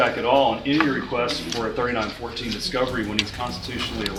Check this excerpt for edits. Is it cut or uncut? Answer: uncut